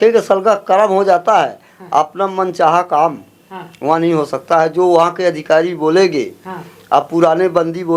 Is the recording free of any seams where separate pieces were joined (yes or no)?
yes